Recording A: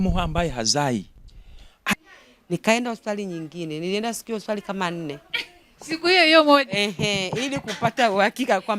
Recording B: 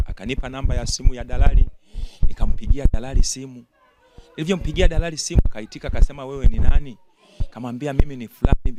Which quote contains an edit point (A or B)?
A